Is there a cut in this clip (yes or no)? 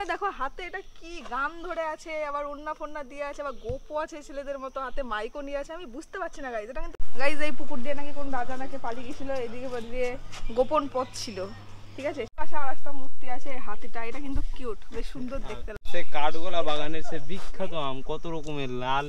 yes